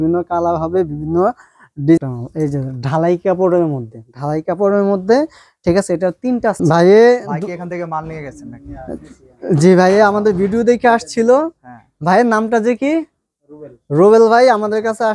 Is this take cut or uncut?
cut